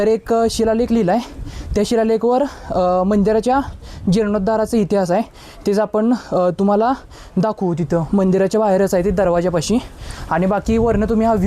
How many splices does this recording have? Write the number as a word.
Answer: zero